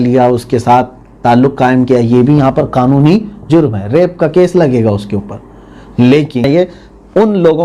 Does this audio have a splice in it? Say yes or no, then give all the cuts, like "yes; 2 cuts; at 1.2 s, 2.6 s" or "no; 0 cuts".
yes; 1 cut; at 6.5 s